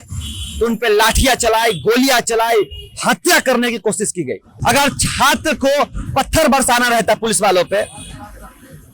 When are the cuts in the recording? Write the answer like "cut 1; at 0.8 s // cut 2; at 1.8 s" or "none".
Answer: cut 1; at 4.5 s